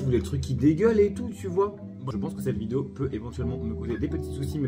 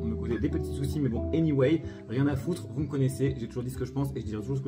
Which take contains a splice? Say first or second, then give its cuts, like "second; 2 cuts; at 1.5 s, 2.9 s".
first; 1 cut; at 1.9 s